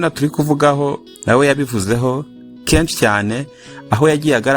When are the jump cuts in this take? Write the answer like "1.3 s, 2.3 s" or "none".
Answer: 1.1 s